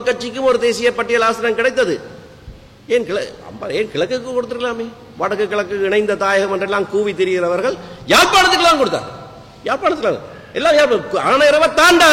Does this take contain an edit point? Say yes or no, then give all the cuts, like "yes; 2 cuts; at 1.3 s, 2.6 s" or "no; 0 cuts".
no; 0 cuts